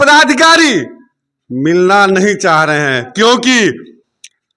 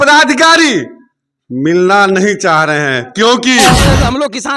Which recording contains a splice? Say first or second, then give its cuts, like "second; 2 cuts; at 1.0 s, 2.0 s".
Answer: second; 1 cut; at 3.7 s